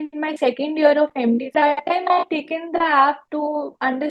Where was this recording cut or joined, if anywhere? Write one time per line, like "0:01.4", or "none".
0:01.5
0:03.2